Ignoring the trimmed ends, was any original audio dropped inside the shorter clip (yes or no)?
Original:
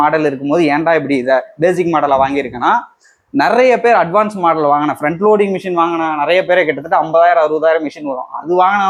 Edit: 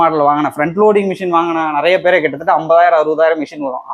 no